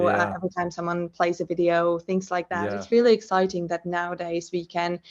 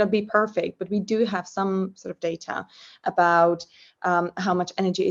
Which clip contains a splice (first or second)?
first